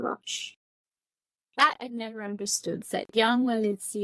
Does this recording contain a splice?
no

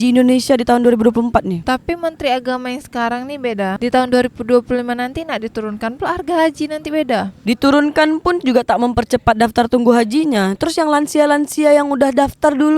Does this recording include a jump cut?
yes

